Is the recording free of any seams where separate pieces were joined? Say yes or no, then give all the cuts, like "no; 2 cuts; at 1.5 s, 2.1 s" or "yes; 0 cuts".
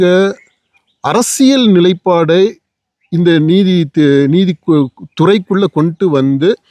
yes; 0 cuts